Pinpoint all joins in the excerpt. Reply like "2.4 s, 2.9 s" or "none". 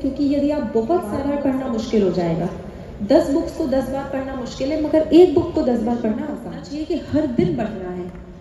1.2 s, 6.3 s